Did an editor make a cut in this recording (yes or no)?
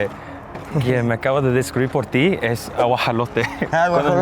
no